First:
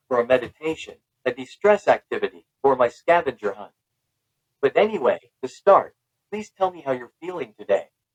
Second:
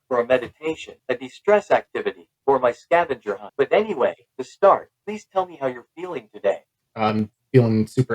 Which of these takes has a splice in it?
second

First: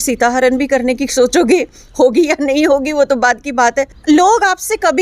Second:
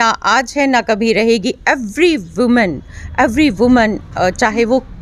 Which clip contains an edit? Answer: first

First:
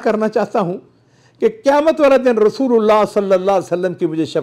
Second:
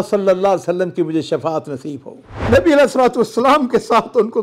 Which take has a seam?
second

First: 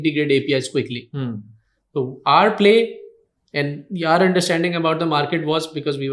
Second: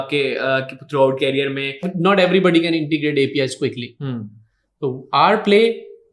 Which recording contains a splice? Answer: second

